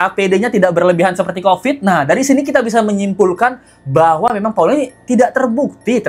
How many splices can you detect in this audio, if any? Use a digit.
0